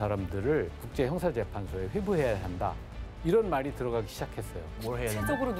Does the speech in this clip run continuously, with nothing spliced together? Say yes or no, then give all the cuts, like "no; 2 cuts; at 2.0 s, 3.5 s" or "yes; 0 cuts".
yes; 0 cuts